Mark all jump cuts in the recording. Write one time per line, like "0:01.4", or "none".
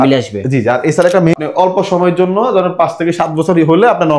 0:01.4